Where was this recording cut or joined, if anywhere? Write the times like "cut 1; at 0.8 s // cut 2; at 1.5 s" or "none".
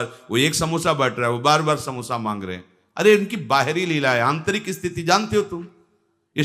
none